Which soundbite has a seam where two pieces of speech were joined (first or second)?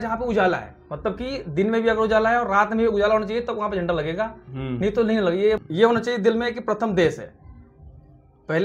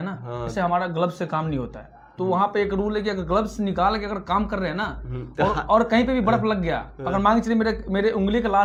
first